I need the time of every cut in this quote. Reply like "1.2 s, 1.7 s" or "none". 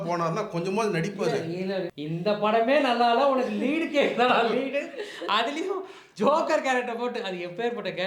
1.9 s